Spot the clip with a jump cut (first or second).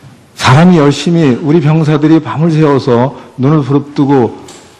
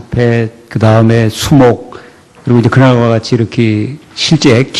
first